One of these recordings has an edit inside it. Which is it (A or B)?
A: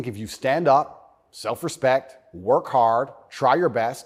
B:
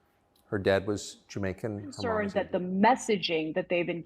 B